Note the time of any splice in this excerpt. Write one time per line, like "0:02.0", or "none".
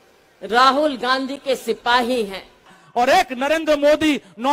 0:02.8